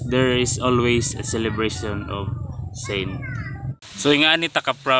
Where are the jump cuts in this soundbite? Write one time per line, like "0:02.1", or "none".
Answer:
0:03.3